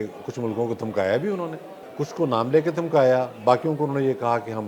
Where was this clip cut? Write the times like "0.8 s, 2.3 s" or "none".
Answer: 1.8 s